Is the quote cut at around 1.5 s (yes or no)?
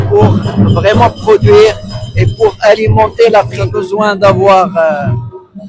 no